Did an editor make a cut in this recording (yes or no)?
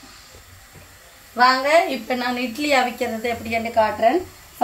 no